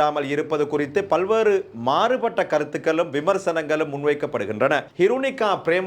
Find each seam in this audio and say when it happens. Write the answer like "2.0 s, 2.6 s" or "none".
4.9 s